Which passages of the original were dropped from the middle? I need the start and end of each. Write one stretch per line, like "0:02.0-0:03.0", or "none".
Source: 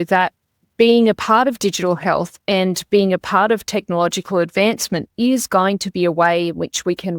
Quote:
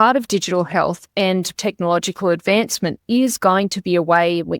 0:02.8-0:03.6